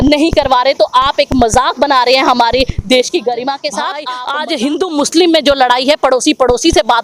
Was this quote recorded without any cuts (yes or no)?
no